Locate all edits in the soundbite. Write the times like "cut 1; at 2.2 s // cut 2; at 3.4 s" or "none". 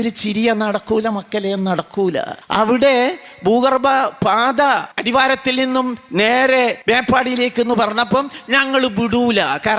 cut 1; at 2.4 s // cut 2; at 4.9 s // cut 3; at 6.8 s